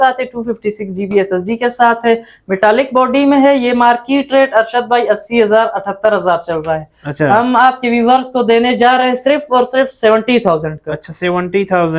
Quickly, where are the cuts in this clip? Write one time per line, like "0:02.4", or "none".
none